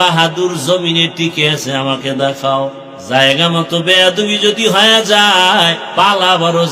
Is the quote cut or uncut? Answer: cut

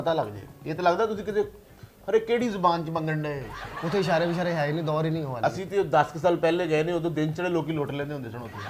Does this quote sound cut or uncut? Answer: cut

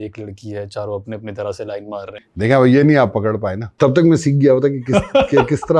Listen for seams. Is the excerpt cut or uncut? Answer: cut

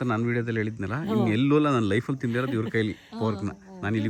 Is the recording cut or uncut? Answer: uncut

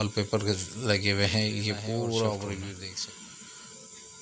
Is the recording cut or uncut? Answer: cut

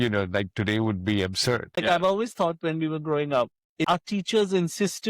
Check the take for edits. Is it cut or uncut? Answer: cut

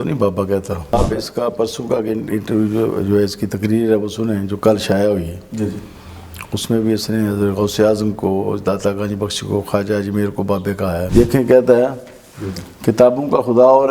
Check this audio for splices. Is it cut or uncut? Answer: cut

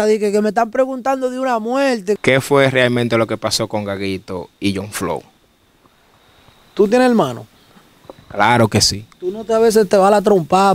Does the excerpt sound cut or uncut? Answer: cut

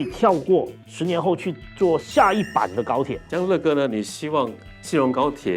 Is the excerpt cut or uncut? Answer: cut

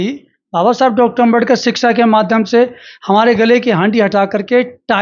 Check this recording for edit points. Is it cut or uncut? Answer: uncut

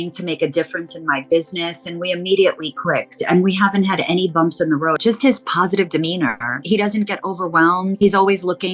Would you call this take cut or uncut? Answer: cut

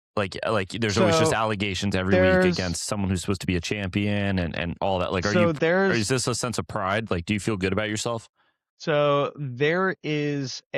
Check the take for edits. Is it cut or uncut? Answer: uncut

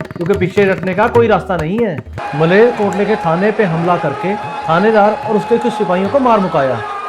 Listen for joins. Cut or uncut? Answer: cut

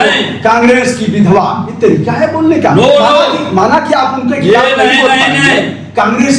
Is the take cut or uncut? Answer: uncut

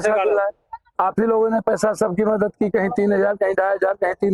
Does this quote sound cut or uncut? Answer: uncut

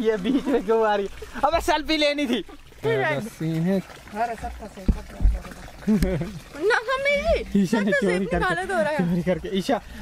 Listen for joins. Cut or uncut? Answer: uncut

